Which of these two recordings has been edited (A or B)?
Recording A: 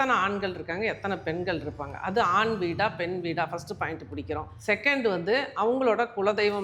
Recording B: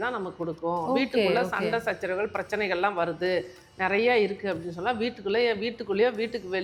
A